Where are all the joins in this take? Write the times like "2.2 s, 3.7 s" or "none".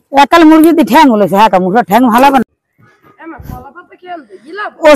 2.4 s